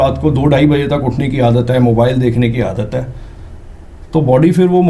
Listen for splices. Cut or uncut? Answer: uncut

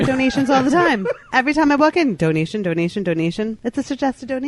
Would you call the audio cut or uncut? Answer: cut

